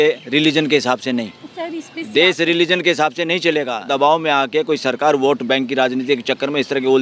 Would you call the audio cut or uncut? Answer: cut